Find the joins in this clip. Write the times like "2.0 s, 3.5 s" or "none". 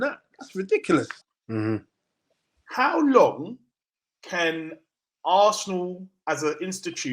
1.2 s